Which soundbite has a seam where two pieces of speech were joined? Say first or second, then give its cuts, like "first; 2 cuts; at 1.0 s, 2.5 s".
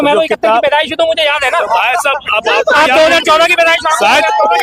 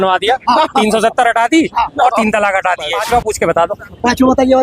second; 1 cut; at 3.0 s